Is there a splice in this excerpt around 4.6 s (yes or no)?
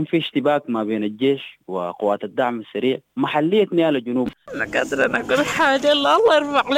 yes